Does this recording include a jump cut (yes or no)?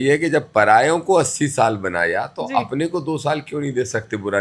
no